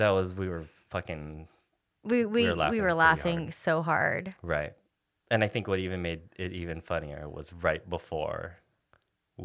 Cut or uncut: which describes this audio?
uncut